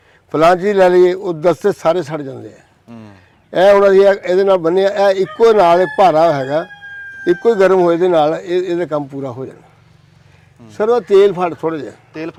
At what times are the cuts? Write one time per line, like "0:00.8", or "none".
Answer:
none